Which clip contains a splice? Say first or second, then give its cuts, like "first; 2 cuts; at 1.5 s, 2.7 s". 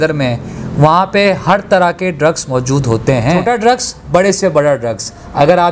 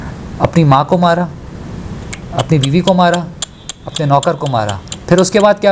first; 1 cut; at 3.4 s